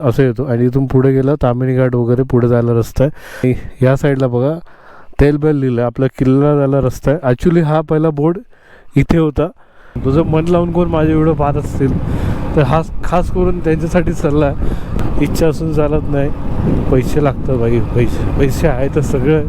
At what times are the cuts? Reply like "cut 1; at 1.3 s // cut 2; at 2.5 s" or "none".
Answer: cut 1; at 3.4 s // cut 2; at 9.9 s // cut 3; at 14.9 s